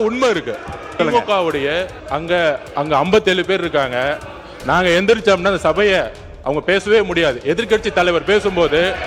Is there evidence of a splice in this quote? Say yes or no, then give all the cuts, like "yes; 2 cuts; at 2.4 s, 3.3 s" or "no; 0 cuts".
yes; 3 cuts; at 0.9 s, 2.0 s, 2.7 s